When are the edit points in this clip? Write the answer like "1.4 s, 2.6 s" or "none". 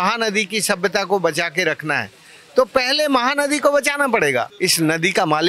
4.5 s